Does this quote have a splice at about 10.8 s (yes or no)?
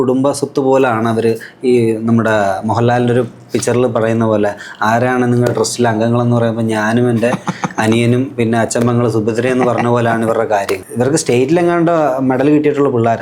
yes